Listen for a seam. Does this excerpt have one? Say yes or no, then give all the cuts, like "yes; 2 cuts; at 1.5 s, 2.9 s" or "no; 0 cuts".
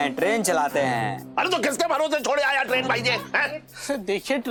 no; 0 cuts